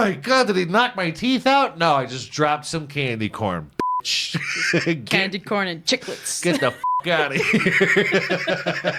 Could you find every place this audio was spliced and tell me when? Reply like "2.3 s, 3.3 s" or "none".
none